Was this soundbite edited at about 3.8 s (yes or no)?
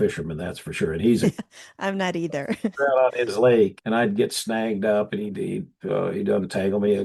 yes